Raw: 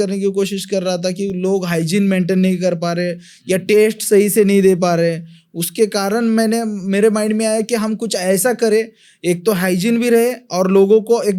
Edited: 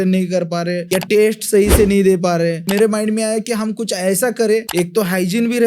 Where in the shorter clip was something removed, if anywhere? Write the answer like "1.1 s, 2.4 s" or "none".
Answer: 0.8 s, 2.6 s, 4.7 s